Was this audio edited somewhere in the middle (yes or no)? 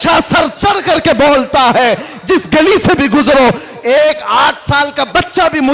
no